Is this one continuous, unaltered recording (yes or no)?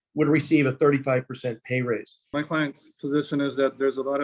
no